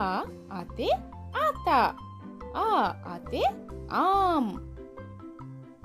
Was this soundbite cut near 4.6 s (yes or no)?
yes